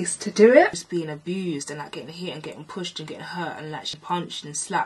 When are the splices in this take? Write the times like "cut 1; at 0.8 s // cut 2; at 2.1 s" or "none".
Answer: cut 1; at 0.8 s // cut 2; at 3.9 s